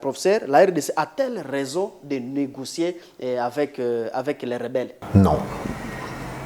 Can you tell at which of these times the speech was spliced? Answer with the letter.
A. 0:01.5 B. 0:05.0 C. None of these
B